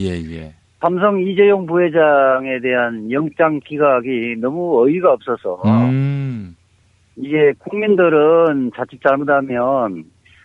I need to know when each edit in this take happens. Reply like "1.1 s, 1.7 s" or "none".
6.3 s